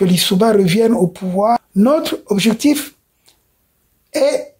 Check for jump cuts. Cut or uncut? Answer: cut